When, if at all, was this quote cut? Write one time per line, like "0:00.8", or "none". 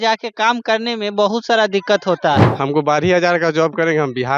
0:02.5